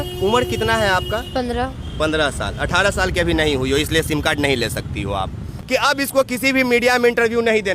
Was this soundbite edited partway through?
yes; 1 cut; at 5.5 s

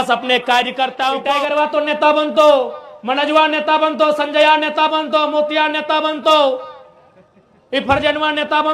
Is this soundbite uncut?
no; 1 cut; at 1.3 s

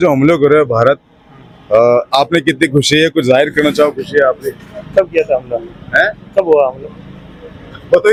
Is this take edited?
no; 0 cuts

